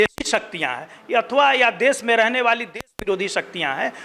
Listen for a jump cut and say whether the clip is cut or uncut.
uncut